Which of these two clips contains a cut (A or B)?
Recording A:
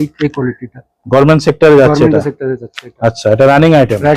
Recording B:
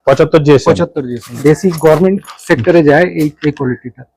B